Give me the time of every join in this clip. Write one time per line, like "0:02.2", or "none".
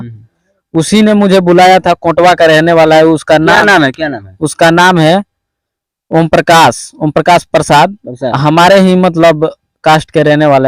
none